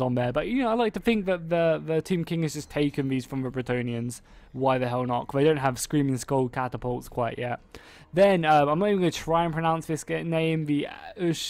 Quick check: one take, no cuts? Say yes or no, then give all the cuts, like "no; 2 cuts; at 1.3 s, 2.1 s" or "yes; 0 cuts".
no; 1 cut; at 1.7 s